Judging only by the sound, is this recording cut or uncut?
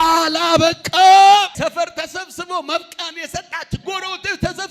cut